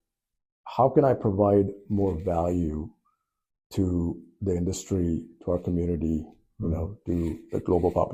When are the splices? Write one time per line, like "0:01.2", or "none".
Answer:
none

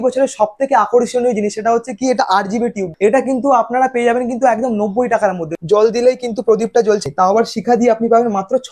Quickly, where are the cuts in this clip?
0:02.9
0:05.5
0:07.0

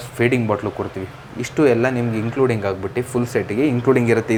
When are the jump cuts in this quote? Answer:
none

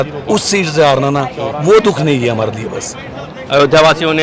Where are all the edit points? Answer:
none

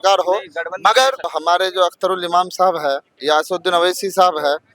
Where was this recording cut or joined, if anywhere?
0:01.3

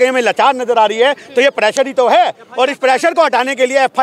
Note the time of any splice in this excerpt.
none

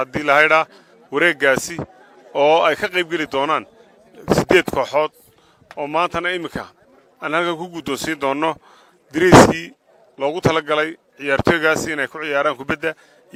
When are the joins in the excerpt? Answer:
none

